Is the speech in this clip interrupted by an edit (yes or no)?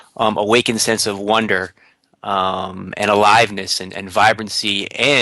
yes